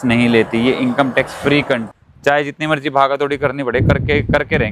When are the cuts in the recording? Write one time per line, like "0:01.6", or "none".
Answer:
0:01.9

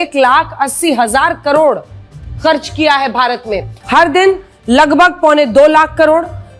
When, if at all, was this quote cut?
0:03.7

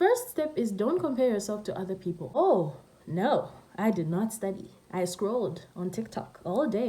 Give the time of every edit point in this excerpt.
0:02.3

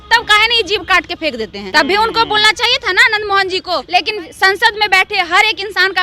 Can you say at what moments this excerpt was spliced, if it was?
0:01.6
0:03.8

